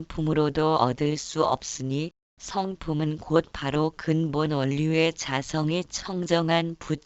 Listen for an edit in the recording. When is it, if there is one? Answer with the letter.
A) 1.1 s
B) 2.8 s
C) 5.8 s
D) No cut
D